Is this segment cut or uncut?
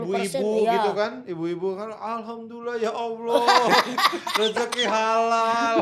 uncut